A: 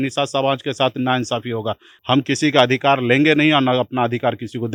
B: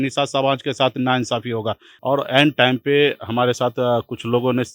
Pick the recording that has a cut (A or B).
B